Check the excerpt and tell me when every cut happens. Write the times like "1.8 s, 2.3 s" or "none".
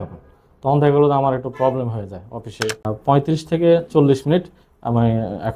2.9 s